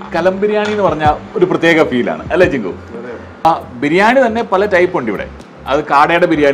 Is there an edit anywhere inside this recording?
yes; 1 cut; at 3.5 s

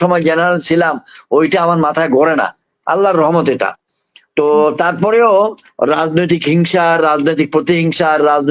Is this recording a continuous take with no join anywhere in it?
yes; 0 cuts

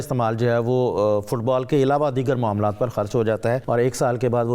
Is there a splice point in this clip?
yes; 1 cut; at 3.6 s

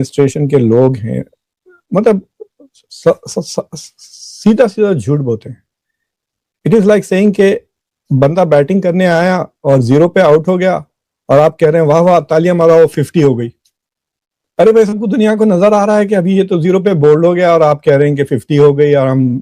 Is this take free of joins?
yes; 0 cuts

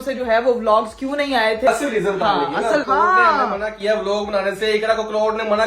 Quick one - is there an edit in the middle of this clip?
yes; 2 cuts; at 1.7 s, 2.8 s

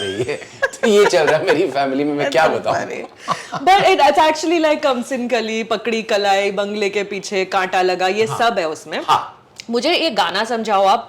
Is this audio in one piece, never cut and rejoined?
yes; 0 cuts

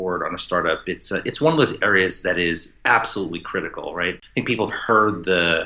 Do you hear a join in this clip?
yes; 1 cut; at 4.2 s

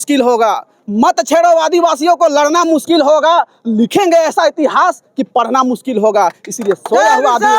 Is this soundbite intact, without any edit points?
yes; 0 cuts

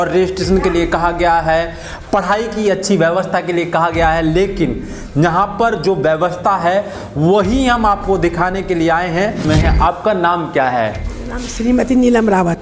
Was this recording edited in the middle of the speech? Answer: yes; 1 cut; at 9.4 s

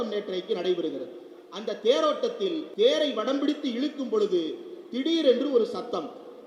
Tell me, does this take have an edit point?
yes; 1 cut; at 2.7 s

